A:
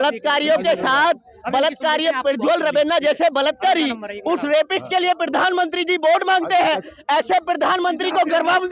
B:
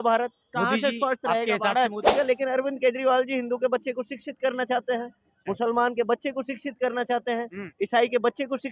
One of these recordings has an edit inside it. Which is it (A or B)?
B